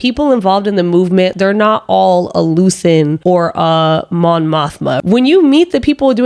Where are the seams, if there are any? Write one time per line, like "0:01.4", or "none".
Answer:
0:01.3
0:03.2
0:05.0